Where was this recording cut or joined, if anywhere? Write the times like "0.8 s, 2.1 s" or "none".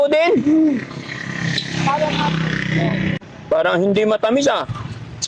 3.2 s